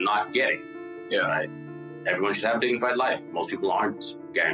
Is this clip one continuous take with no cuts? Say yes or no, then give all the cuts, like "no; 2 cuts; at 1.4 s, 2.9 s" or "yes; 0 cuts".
no; 1 cut; at 1.9 s